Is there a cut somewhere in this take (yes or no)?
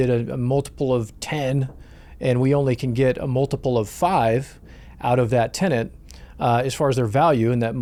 no